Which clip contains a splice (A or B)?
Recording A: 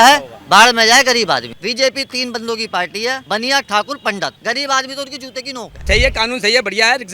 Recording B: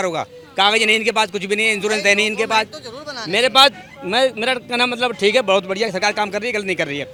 A